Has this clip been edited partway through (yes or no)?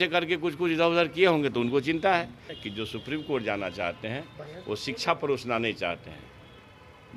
yes